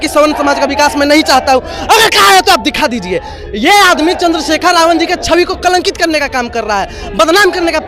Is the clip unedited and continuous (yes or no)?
yes